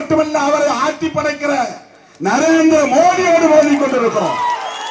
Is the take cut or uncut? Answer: uncut